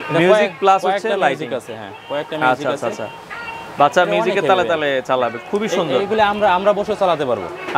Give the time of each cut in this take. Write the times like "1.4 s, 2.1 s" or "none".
none